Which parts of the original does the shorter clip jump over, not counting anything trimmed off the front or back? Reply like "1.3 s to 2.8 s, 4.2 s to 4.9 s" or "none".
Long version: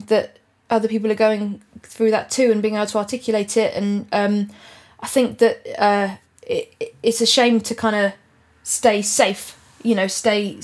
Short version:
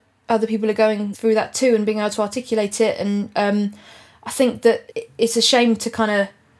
1.5 s to 1.9 s, 5.7 s to 6.7 s